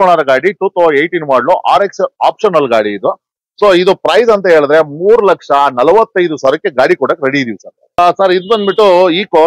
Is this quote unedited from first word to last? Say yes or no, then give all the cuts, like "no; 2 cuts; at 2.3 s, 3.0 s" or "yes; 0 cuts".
no; 1 cut; at 8.0 s